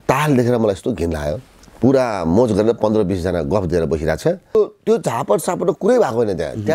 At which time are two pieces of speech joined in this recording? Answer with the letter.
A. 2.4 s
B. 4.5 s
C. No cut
B